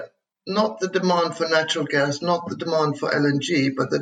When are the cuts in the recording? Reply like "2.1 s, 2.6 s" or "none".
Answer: none